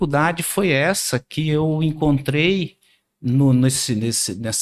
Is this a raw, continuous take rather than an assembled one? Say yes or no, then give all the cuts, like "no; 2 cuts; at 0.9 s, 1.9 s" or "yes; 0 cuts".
yes; 0 cuts